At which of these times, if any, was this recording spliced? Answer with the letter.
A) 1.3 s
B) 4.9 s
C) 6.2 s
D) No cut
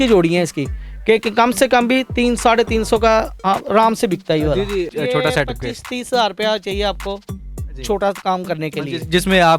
B